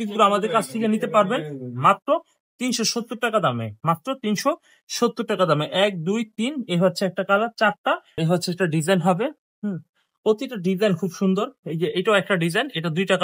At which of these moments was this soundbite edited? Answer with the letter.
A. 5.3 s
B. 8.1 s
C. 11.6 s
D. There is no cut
B